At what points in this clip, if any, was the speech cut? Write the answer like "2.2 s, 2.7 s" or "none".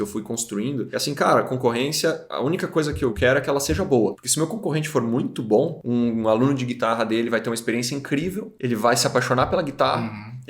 0.9 s, 2.3 s, 3.2 s, 4.2 s, 5.8 s, 8.5 s